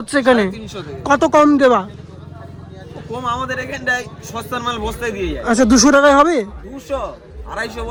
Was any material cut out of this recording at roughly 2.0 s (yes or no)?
no